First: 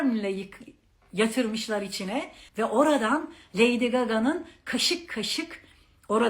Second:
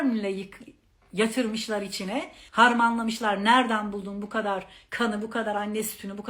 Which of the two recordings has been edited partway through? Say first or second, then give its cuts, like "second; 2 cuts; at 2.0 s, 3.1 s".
first; 1 cut; at 2.4 s